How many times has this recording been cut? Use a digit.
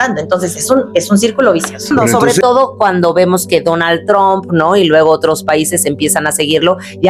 1